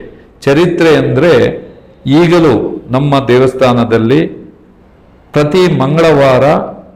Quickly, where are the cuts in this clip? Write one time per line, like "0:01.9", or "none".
none